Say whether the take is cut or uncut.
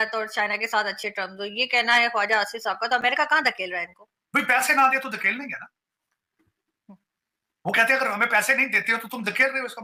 uncut